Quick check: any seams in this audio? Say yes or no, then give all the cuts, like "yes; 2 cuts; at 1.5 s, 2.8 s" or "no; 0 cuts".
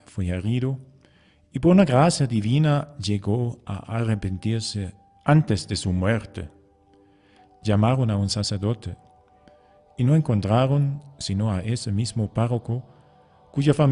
no; 0 cuts